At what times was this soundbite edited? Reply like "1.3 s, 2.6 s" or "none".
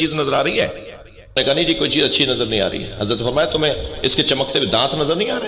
1.3 s